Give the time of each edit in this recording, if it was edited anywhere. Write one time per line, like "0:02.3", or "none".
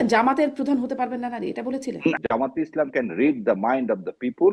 0:02.2